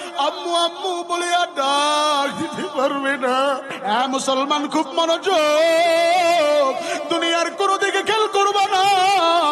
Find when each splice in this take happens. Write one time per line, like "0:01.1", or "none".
0:03.7